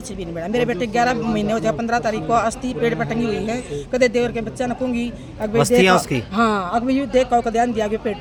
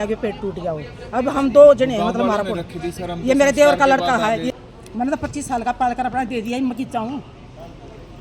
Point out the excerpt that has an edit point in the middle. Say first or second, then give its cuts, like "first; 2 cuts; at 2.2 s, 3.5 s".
second; 1 cut; at 4.5 s